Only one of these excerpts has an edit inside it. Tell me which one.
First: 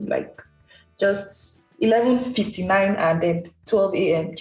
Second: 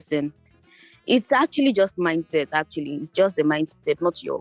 first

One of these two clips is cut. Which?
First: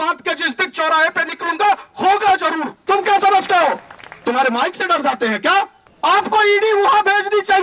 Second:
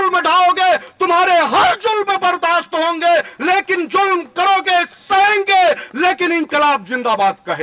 first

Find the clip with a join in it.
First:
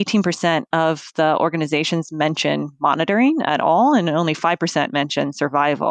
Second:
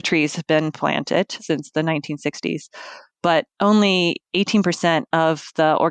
second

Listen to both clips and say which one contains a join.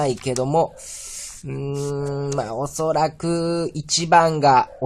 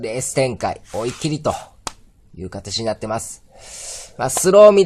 first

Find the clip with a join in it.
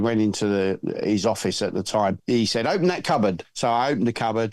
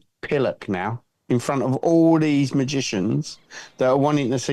first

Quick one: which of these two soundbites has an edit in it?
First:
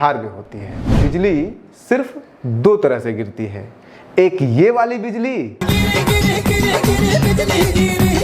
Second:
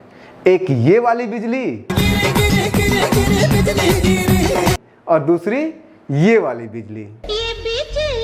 first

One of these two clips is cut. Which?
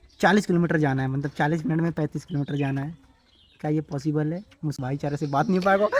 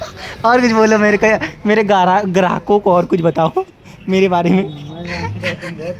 first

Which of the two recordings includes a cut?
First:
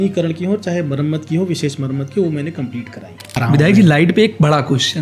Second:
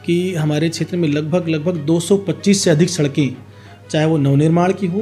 first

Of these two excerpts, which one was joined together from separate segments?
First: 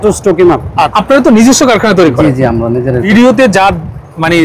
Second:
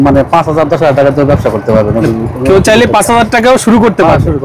first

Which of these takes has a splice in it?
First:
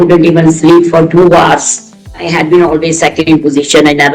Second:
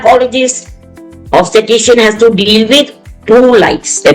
first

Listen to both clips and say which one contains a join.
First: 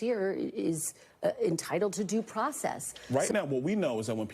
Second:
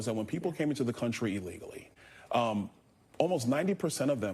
first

